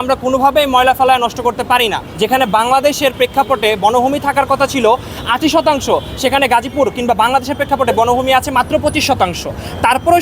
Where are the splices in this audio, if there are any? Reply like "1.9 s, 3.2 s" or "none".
none